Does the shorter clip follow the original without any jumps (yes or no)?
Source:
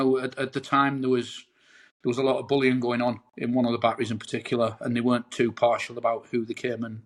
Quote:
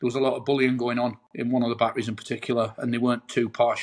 yes